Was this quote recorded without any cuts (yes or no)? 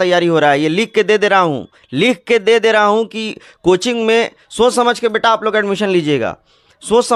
yes